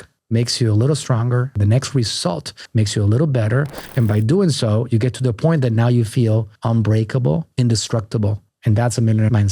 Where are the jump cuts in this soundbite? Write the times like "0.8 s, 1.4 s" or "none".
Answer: 8.5 s